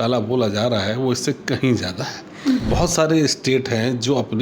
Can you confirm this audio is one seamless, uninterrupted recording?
no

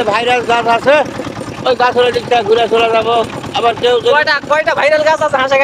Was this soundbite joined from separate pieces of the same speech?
no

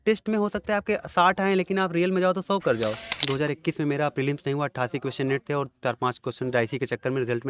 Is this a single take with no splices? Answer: no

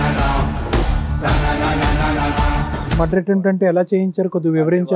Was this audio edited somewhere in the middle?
yes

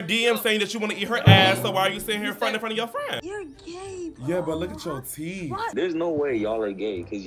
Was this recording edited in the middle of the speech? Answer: yes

